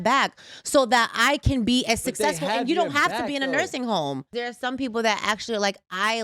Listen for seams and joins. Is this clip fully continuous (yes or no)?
no